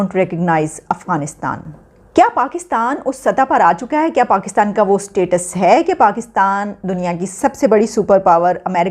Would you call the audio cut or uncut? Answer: cut